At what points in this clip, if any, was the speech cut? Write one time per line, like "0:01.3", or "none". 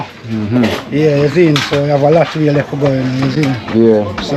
none

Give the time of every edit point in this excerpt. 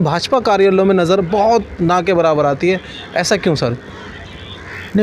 none

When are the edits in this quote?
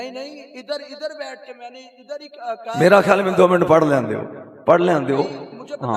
none

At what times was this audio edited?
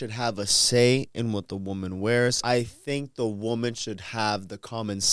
0:02.4

